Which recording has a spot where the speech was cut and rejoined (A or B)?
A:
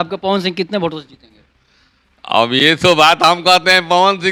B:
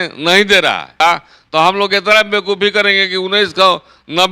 B